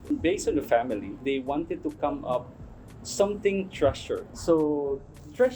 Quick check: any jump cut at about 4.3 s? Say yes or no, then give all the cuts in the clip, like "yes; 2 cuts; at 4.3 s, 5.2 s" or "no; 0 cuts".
yes; 2 cuts; at 1.2 s, 4.3 s